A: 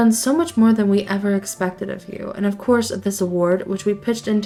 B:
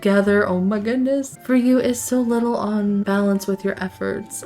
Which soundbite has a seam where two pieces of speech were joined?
B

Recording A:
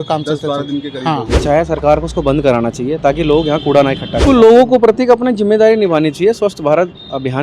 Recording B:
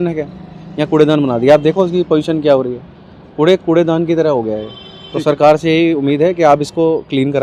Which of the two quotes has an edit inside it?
A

